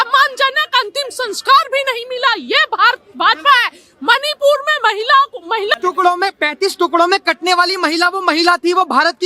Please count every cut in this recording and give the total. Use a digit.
1